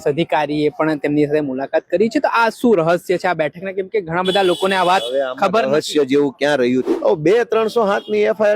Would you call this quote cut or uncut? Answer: cut